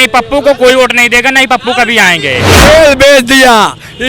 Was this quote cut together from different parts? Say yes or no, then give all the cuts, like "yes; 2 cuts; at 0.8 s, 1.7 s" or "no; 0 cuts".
yes; 1 cut; at 2.5 s